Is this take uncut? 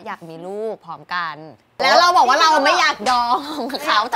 yes; 0 cuts

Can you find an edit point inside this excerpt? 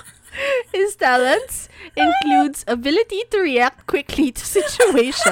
no; 0 cuts

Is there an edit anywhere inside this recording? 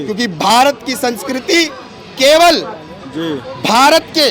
no; 0 cuts

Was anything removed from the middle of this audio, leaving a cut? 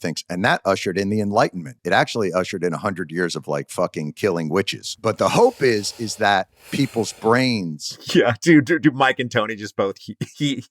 yes; 3 cuts; at 1.8 s, 4.8 s, 6.6 s

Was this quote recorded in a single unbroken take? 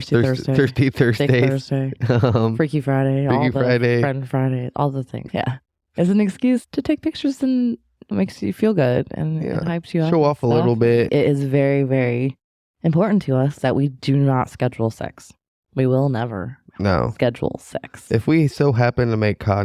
no; 2 cuts; at 5.2 s, 11.1 s

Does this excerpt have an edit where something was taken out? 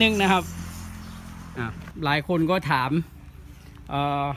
yes; 1 cut; at 1.8 s

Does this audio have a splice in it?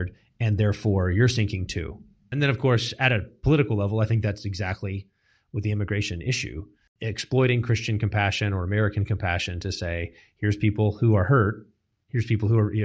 yes; 2 cuts; at 2.2 s, 6.8 s

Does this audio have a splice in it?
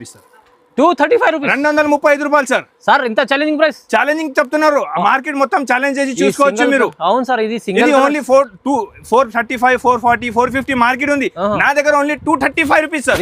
no; 0 cuts

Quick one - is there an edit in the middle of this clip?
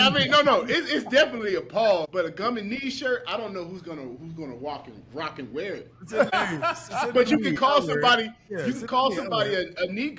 yes; 2 cuts; at 2.1 s, 6.3 s

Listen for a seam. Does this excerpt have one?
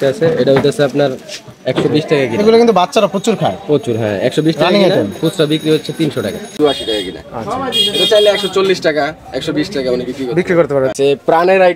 yes; 2 cuts; at 6.5 s, 10.9 s

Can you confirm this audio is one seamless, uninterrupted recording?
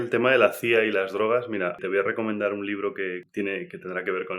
no; 1 cut; at 1.8 s

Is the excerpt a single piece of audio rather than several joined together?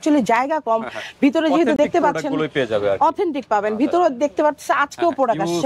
yes; 0 cuts

